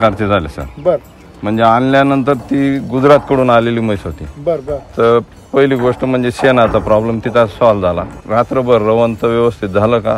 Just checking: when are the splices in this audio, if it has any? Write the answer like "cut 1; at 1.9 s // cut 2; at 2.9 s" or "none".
cut 1; at 8.2 s